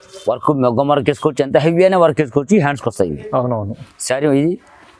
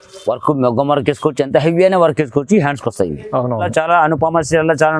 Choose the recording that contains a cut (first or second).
second